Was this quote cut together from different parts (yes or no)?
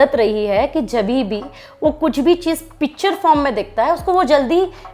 no